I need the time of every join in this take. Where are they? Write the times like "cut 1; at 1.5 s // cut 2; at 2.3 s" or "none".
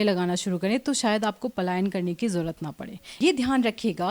cut 1; at 3.2 s